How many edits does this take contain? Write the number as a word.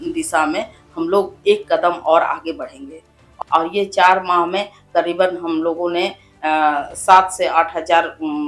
one